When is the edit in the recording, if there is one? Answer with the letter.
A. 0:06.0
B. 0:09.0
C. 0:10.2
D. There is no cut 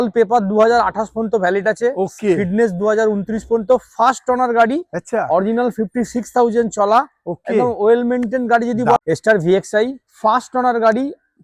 B